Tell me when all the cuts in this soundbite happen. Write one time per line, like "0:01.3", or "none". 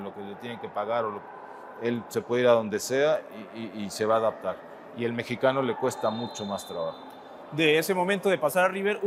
none